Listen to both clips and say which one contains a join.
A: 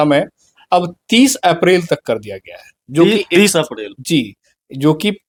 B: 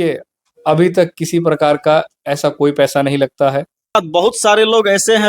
B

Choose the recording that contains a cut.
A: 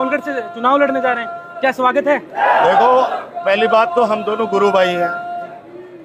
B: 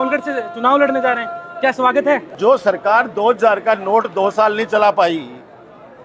B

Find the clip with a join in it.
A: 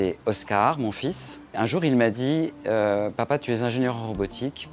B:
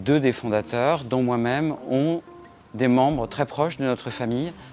A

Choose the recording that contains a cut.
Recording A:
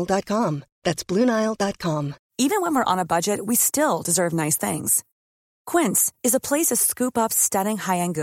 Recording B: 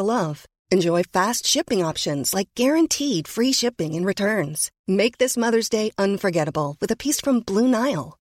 A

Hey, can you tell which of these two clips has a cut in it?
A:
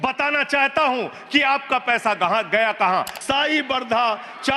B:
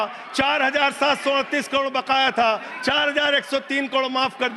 A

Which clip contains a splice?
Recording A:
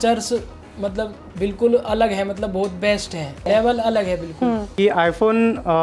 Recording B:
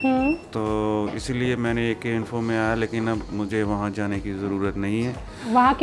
A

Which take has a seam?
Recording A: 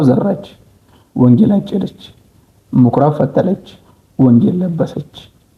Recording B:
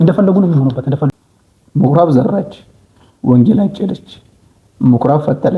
B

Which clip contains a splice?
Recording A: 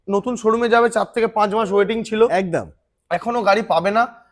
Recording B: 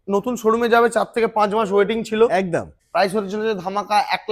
B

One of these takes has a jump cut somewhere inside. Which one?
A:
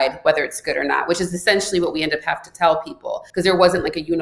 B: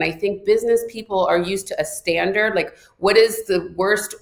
A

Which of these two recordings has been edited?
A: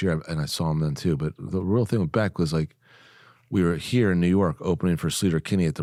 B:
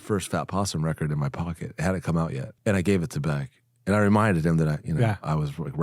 B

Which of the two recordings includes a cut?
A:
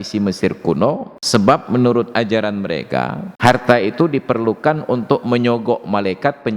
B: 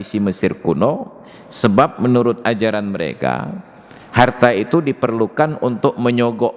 A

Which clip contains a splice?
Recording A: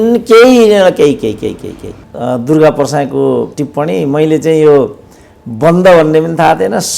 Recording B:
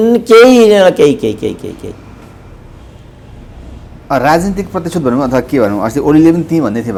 A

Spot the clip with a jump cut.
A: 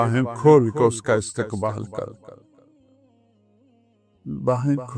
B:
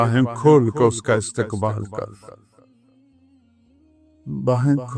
B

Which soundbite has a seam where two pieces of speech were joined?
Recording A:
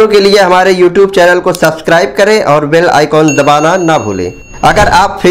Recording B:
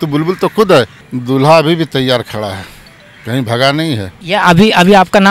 B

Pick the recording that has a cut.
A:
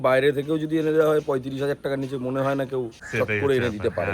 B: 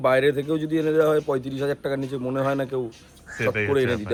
A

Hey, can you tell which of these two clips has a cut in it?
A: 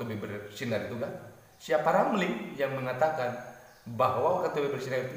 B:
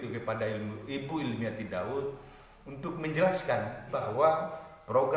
B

